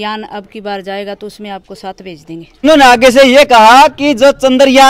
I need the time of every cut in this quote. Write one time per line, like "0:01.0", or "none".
0:02.4